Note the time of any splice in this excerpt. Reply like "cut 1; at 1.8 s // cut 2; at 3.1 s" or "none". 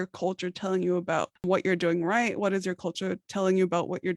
cut 1; at 1.5 s // cut 2; at 3.2 s